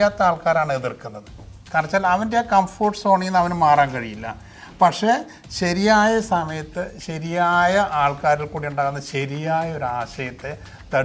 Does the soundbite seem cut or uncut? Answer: uncut